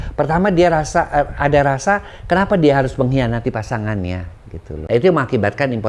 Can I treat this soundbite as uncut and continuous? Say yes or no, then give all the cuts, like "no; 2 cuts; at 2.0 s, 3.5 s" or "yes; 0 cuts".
no; 1 cut; at 4.7 s